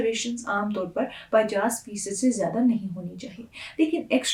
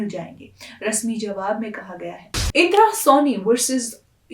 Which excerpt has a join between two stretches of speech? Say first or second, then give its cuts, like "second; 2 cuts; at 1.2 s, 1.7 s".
second; 1 cut; at 2.3 s